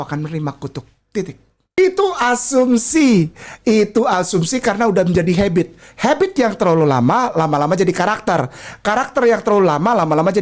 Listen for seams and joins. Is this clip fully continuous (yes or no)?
no